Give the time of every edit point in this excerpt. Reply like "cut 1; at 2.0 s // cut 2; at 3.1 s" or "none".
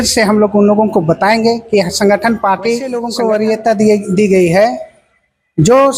cut 1; at 3.0 s